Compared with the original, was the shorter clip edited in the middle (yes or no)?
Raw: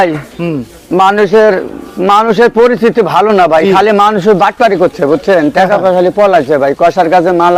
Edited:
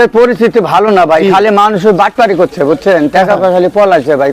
no